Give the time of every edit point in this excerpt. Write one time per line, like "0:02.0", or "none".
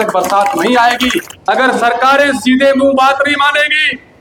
0:01.3